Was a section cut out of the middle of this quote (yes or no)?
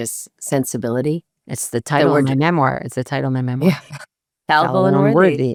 no